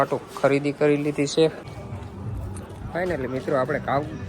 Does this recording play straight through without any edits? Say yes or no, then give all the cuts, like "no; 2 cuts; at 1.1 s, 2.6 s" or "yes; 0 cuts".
no; 1 cut; at 1.7 s